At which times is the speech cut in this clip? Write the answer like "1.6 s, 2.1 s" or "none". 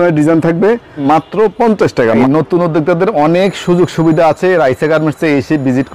1.0 s, 2.2 s